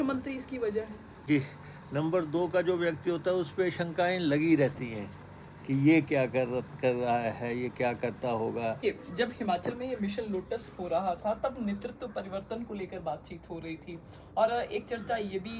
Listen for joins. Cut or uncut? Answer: cut